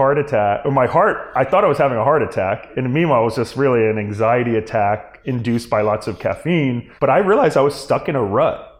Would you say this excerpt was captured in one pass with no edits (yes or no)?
yes